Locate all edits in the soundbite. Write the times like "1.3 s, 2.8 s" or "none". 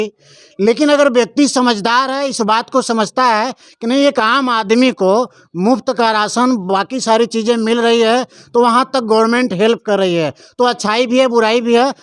none